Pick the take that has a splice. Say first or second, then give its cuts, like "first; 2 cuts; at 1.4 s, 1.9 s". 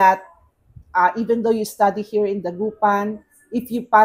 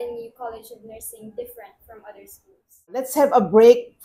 second; 1 cut; at 3.1 s